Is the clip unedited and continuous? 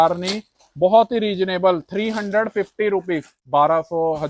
no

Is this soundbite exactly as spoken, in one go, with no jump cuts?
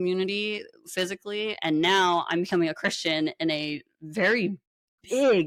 yes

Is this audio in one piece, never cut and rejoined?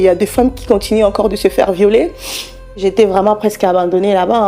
no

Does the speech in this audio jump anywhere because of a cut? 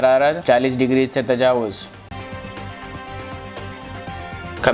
no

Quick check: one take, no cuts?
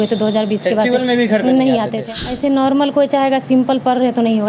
no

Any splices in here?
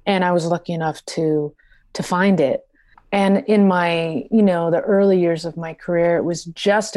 no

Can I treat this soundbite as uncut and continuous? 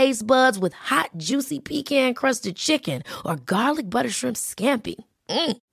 yes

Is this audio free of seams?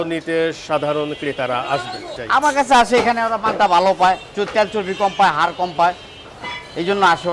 no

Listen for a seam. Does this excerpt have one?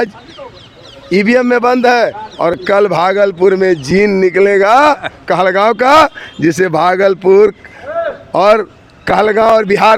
no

